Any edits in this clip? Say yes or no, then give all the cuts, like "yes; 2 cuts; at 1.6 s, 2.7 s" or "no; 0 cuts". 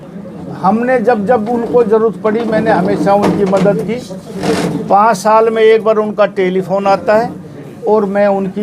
no; 0 cuts